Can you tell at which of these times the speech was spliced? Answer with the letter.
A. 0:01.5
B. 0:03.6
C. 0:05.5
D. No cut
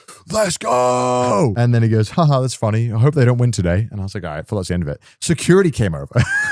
A